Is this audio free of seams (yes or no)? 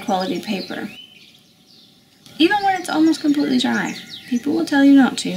yes